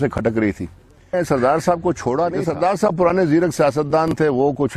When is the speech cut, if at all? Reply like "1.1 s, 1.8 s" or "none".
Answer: 1.1 s, 2.4 s